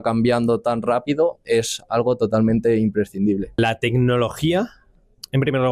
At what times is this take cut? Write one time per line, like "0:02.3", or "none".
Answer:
0:03.6